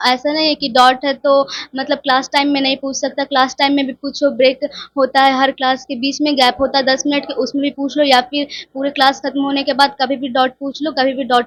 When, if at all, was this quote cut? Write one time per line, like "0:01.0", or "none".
none